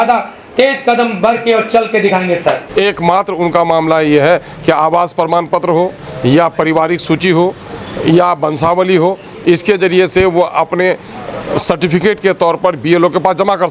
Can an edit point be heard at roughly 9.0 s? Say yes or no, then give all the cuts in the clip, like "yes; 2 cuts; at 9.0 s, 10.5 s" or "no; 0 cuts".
no; 1 cut; at 2.6 s